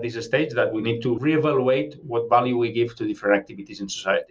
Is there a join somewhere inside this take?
yes; 2 cuts; at 1.2 s, 2.0 s

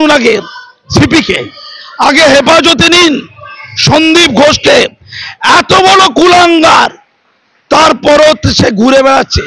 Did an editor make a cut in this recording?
no; 0 cuts

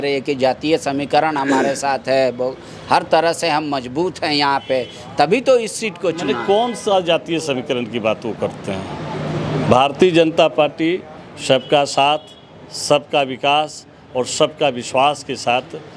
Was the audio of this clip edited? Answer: no; 0 cuts

